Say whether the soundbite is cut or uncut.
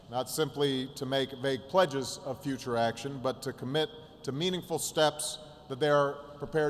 uncut